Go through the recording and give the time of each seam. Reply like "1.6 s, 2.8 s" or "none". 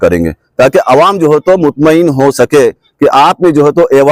none